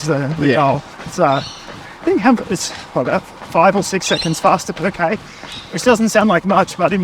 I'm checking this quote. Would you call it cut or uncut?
uncut